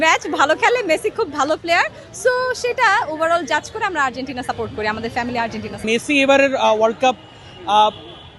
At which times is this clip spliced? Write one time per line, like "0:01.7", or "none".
0:05.8